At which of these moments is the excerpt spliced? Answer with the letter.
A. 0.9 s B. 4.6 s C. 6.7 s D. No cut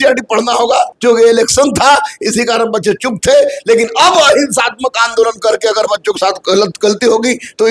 A